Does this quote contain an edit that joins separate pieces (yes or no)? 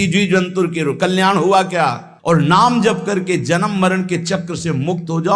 yes